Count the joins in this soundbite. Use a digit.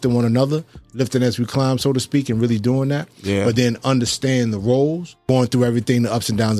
1